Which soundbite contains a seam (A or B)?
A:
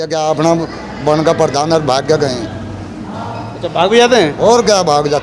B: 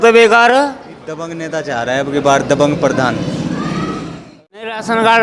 B